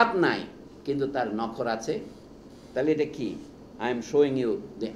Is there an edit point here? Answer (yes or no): no